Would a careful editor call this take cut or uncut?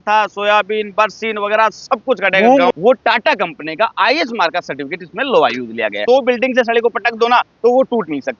cut